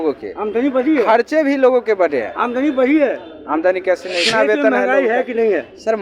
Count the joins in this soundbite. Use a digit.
1